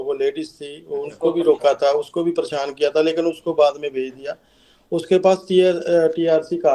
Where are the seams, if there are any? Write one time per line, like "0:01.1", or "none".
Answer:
none